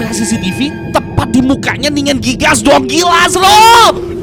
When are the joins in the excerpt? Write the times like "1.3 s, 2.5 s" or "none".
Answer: none